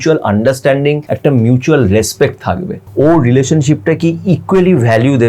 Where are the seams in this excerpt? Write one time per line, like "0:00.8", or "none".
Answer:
0:01.1
0:02.8

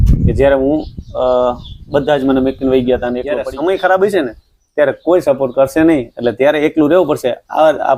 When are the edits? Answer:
0:03.3

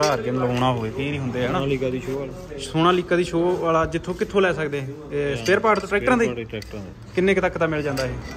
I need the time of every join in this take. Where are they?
none

